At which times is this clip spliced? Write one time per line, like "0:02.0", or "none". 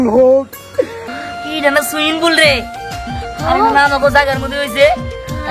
0:01.0